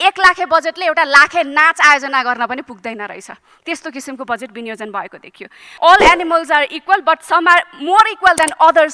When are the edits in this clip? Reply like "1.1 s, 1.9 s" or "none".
5.6 s